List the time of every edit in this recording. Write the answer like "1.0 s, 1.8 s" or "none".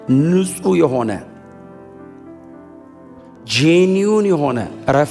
1.2 s, 2.8 s